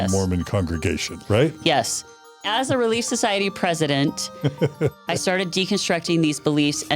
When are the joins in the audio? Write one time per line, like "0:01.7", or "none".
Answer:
0:01.1
0:02.4
0:05.0